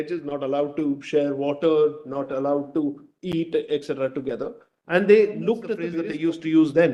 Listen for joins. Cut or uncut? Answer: cut